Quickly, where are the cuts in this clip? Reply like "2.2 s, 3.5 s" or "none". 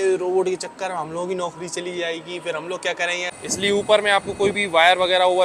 3.2 s